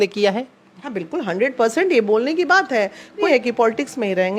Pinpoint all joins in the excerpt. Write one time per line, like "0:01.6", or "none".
0:03.2